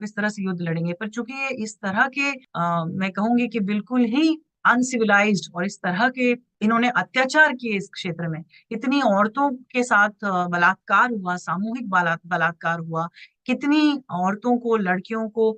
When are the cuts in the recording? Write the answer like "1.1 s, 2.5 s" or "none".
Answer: 4.5 s, 6.5 s